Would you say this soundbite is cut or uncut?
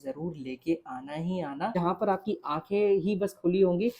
cut